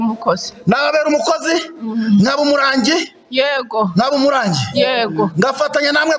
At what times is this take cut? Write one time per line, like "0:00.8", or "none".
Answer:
none